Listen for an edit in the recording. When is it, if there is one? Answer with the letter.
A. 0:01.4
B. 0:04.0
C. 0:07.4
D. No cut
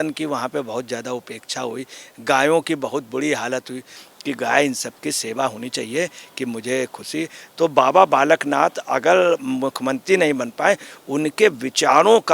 B